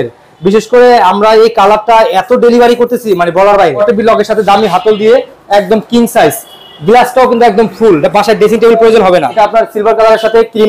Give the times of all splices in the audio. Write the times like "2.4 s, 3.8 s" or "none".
3.8 s, 9.3 s